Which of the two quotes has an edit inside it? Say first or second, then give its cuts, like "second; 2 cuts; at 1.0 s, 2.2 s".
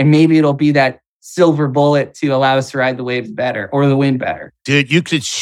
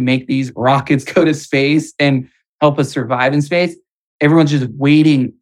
first; 1 cut; at 4.5 s